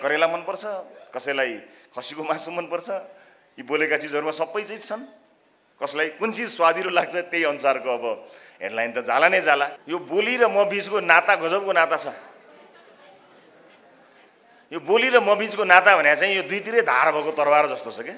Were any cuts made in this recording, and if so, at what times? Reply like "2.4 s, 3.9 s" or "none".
9.8 s